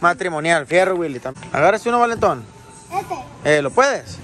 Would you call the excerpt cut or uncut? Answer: cut